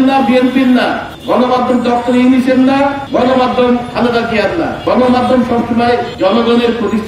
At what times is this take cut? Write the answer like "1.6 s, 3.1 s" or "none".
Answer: 1.1 s, 3.0 s, 4.8 s, 6.1 s